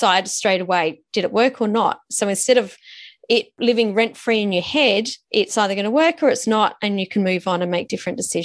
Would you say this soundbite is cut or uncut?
cut